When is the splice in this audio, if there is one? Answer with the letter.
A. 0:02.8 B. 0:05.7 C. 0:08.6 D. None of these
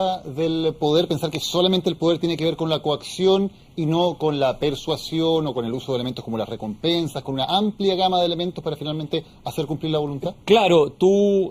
D